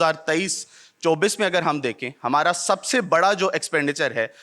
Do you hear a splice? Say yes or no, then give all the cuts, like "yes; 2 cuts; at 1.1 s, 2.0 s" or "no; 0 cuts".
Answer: no; 0 cuts